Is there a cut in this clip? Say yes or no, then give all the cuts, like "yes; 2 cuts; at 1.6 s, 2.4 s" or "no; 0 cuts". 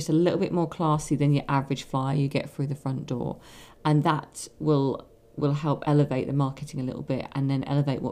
no; 0 cuts